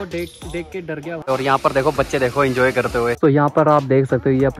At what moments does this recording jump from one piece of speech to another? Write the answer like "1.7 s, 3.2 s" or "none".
1.3 s, 3.2 s